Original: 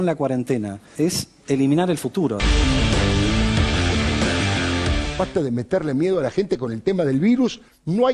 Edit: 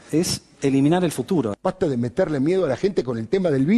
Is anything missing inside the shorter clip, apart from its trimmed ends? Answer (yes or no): yes